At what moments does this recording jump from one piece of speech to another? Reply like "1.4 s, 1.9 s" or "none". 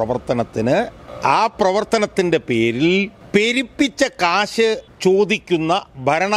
1.0 s, 3.2 s, 4.9 s